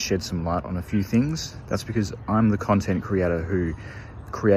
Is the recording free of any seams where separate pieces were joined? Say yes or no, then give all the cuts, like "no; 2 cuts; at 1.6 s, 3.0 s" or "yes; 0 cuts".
yes; 0 cuts